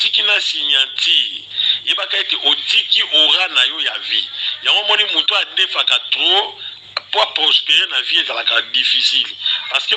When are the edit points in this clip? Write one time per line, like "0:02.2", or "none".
none